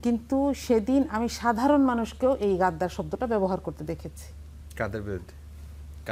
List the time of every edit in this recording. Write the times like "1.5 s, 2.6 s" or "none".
none